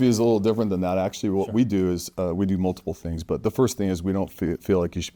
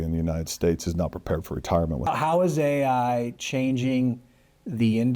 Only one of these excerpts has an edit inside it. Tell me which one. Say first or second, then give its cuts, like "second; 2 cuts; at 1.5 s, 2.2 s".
second; 1 cut; at 2.1 s